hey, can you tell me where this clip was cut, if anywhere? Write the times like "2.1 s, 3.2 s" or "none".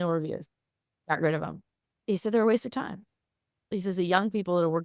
1.0 s, 3.7 s